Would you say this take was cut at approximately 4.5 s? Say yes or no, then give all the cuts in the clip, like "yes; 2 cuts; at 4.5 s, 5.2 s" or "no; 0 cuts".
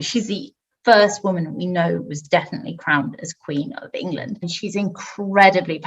yes; 1 cut; at 4.5 s